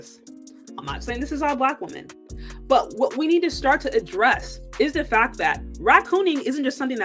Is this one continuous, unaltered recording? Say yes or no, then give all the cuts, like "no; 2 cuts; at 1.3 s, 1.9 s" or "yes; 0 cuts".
yes; 0 cuts